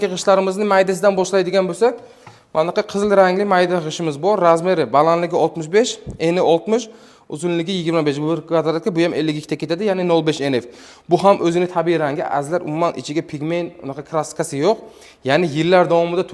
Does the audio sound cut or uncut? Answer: uncut